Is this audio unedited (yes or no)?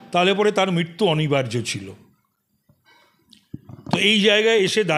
yes